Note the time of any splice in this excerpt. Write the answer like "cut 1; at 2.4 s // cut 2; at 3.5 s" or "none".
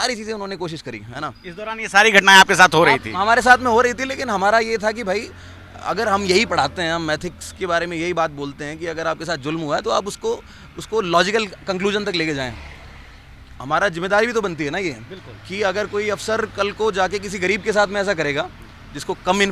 none